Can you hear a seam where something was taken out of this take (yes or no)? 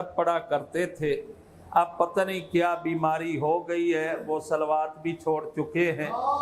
no